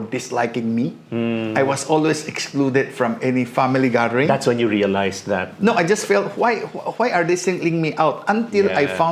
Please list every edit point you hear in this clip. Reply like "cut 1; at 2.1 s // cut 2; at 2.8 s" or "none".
none

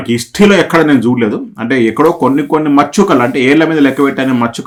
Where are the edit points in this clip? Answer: none

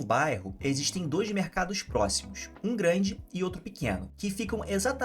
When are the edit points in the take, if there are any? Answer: cut 1; at 4.1 s

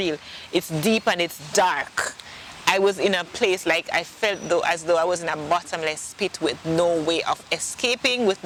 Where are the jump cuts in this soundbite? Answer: none

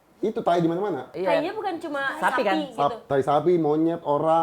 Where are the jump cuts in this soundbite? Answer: cut 1; at 1.1 s

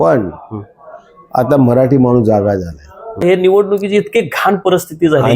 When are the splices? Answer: cut 1; at 3.2 s

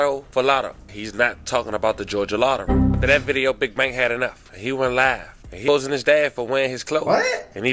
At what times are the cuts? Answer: cut 1; at 2.9 s // cut 2; at 5.6 s

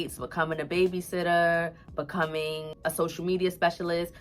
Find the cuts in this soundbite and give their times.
cut 1; at 2.7 s

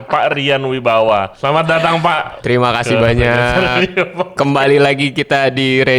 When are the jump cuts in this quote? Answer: cut 1; at 1.3 s // cut 2; at 2.3 s

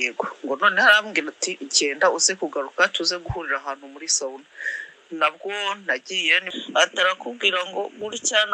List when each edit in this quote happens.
cut 1; at 6.5 s

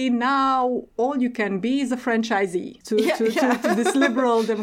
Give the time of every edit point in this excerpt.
cut 1; at 2.8 s

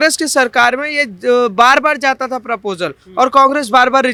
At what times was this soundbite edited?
none

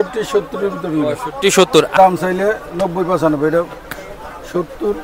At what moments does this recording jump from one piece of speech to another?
cut 1; at 1.9 s

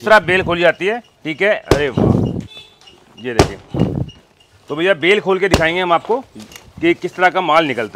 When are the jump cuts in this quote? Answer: none

